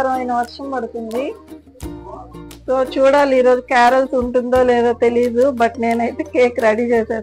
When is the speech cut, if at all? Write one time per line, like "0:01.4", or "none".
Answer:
none